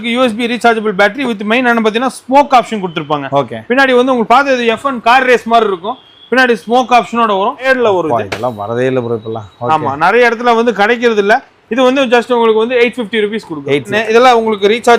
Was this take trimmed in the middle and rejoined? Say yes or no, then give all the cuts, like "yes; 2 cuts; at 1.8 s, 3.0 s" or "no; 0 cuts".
yes; 2 cuts; at 7.7 s, 13.9 s